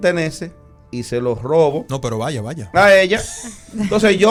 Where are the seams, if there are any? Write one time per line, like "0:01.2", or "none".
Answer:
none